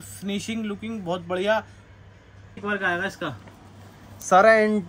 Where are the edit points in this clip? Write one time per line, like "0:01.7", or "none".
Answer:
0:02.6